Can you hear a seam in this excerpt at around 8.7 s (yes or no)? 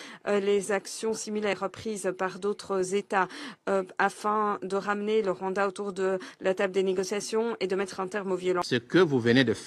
yes